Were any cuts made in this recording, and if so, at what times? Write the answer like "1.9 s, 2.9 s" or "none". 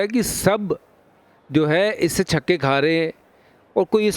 none